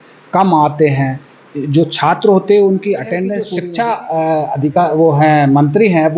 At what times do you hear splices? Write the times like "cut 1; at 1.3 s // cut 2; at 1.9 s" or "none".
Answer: cut 1; at 3.5 s